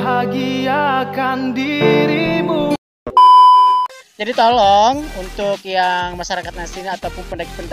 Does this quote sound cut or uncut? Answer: cut